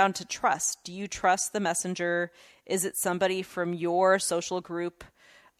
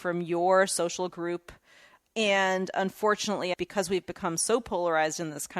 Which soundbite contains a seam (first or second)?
second